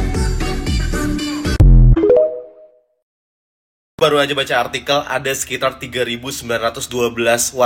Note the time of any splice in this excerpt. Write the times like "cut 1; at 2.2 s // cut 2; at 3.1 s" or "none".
cut 1; at 4.4 s